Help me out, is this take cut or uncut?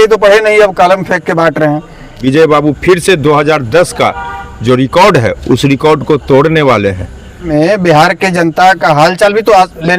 cut